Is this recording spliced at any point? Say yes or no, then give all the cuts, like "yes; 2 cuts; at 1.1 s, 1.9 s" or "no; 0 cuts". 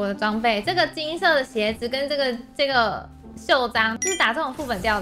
yes; 1 cut; at 4.0 s